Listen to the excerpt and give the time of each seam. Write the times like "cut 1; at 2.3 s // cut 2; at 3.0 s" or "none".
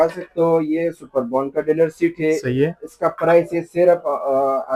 none